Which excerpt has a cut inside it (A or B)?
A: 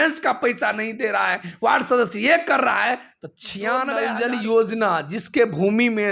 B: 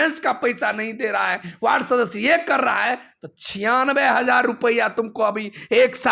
A